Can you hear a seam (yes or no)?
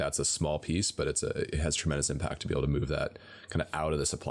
no